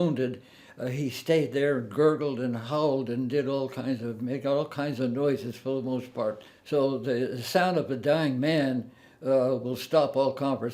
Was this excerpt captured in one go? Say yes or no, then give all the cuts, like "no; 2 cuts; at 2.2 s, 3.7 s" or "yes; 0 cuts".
no; 1 cut; at 6.5 s